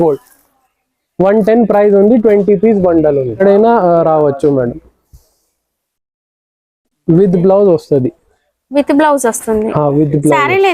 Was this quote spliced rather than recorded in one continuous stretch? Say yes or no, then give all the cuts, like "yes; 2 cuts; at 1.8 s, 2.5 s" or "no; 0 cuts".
yes; 1 cut; at 3.4 s